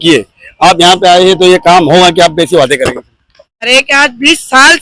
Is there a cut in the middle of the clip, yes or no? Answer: yes